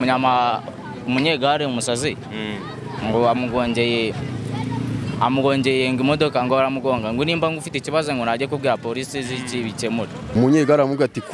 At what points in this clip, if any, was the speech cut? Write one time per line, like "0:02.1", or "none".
0:10.3

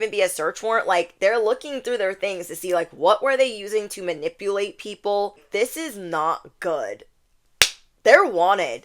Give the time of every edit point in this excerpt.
0:05.4

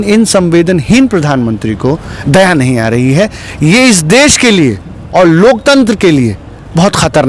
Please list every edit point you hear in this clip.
none

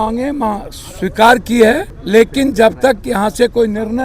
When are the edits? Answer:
0:01.9

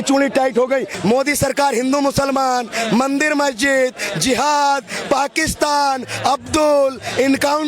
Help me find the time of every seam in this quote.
0:00.9

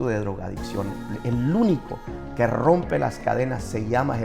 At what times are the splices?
none

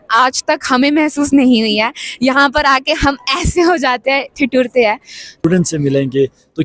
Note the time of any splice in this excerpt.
0:05.3

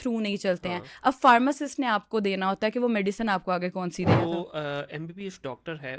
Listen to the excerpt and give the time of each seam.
0:04.2

